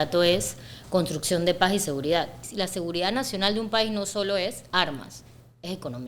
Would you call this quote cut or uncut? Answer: cut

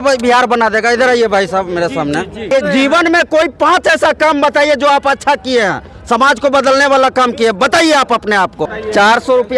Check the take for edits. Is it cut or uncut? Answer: cut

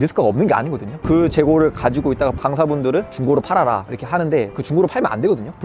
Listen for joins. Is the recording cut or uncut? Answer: cut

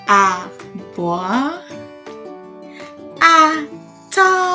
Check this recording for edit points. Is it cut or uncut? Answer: cut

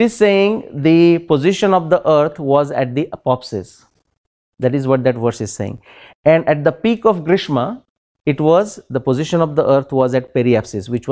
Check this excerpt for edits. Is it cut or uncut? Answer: uncut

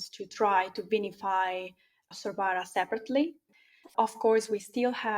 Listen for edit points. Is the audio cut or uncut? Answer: cut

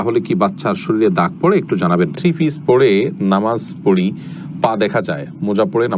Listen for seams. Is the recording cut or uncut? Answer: cut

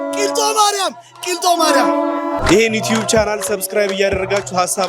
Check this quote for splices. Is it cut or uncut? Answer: cut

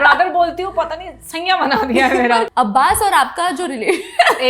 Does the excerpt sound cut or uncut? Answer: cut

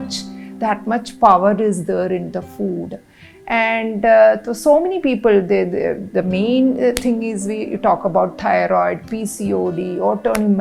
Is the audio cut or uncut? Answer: uncut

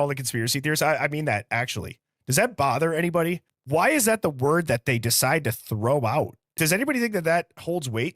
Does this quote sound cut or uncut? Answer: cut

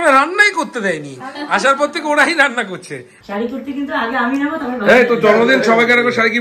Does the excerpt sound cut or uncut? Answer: cut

